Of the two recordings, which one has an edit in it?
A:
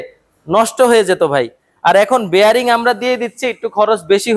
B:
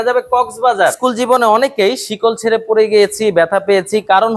B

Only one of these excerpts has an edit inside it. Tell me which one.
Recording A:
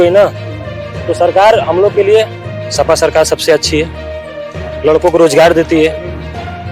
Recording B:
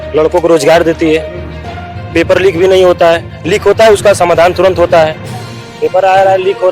B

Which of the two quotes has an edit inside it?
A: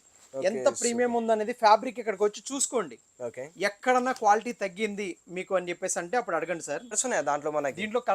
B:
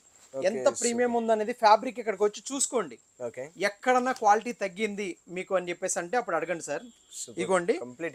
A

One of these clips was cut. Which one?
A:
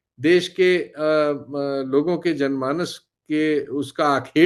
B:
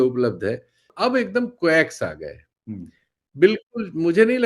B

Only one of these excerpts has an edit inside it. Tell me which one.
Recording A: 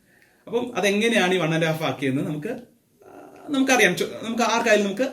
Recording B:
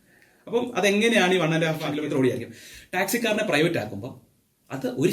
B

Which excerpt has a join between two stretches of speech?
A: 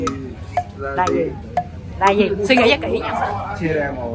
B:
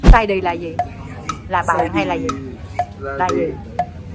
A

